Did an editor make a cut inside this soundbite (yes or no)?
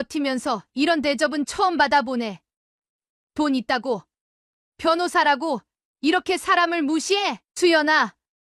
yes